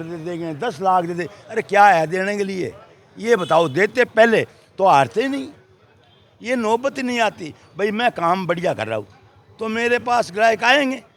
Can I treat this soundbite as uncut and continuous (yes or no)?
yes